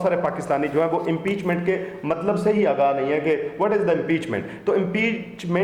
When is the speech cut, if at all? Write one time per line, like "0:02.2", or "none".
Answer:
none